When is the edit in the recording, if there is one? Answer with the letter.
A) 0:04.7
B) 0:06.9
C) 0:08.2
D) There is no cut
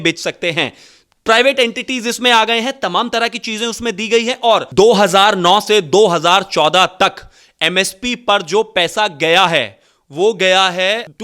A